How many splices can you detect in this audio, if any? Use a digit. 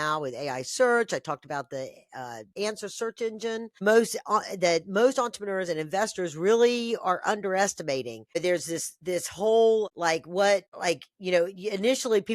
5